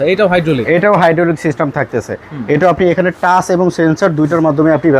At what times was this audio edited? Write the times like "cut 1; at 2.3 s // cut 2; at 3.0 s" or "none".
none

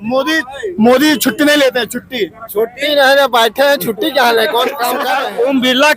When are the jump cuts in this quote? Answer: cut 1; at 4.9 s

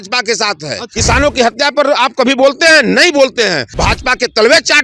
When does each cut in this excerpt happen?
cut 1; at 0.8 s // cut 2; at 3.7 s

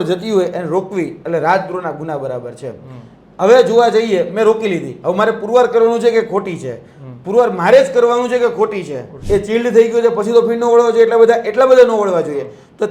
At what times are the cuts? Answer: cut 1; at 9.1 s

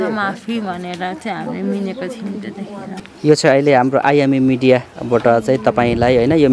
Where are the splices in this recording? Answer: cut 1; at 3.0 s

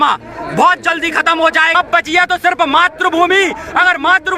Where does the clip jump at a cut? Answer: cut 1; at 1.7 s

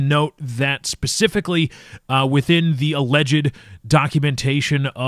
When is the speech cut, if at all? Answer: cut 1; at 1.7 s

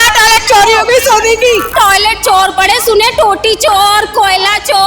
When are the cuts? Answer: cut 1; at 1.7 s

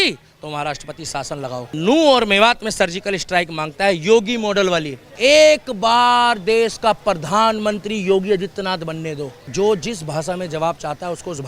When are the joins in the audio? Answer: cut 1; at 1.7 s // cut 2; at 5.1 s // cut 3; at 9.4 s

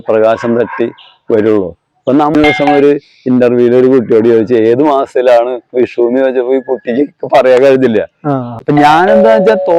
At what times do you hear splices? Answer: cut 1; at 2.3 s // cut 2; at 8.6 s

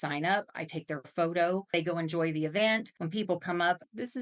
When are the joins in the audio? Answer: cut 1; at 1.7 s // cut 2; at 3.4 s

